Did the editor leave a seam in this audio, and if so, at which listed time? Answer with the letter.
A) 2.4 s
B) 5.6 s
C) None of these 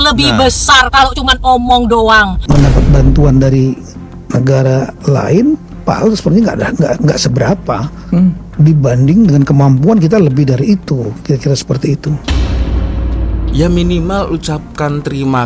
A